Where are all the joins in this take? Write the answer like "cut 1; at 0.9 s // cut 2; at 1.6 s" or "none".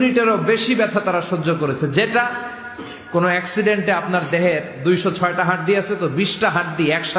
none

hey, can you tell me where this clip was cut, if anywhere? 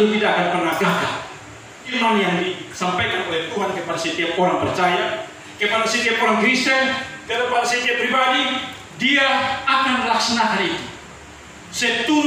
cut 1; at 1.9 s

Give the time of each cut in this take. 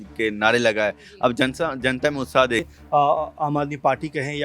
cut 1; at 2.7 s

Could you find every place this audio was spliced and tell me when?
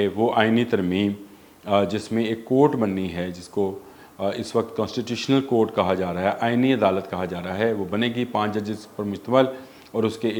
none

